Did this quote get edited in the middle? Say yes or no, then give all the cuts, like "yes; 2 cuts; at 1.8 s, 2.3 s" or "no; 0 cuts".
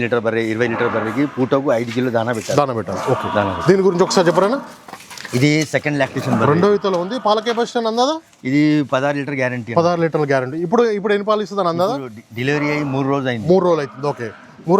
no; 0 cuts